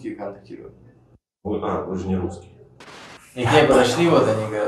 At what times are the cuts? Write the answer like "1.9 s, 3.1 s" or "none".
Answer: 2.9 s